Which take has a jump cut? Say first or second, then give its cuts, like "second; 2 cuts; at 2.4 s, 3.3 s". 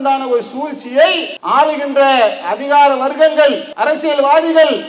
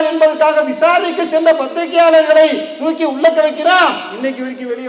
first; 2 cuts; at 1.3 s, 3.7 s